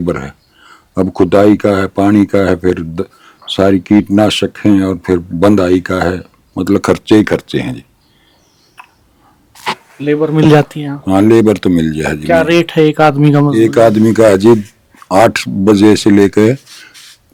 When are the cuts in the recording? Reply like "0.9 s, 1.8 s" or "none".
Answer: none